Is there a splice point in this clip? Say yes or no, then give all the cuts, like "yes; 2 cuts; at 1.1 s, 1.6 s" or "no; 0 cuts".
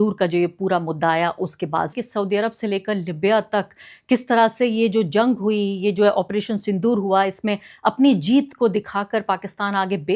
yes; 1 cut; at 1.9 s